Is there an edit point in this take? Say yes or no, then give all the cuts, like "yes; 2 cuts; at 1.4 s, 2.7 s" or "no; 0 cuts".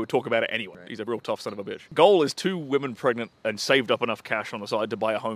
yes; 3 cuts; at 0.8 s, 1.9 s, 3.4 s